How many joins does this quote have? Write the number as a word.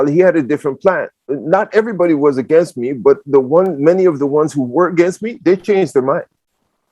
one